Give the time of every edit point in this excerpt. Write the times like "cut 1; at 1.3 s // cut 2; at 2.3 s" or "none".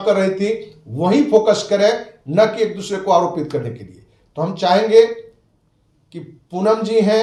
none